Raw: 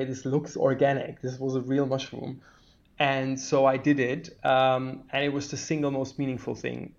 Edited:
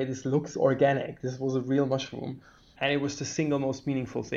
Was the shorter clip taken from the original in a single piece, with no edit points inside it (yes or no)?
no